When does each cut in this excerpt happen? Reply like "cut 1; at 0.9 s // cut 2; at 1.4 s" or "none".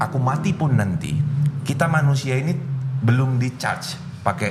none